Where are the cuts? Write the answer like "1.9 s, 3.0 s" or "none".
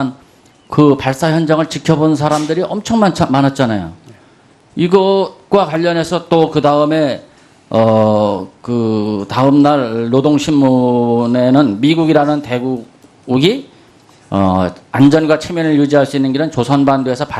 none

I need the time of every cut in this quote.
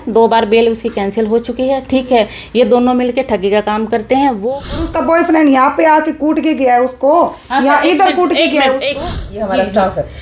4.4 s, 9.0 s

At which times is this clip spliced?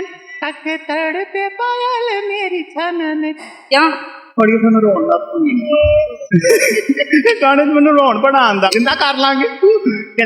3.4 s, 8.7 s

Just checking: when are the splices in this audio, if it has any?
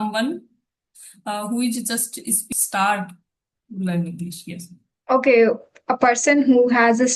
2.4 s

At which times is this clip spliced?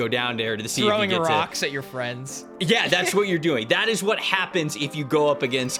none

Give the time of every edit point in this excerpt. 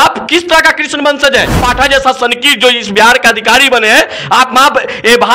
1.6 s

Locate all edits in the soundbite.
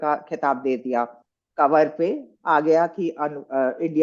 none

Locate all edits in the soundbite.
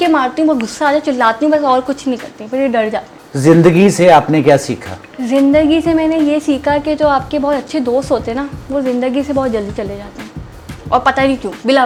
none

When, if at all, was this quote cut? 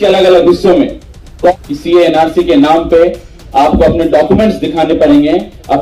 1.5 s

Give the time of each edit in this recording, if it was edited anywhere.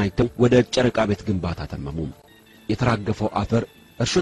2.2 s

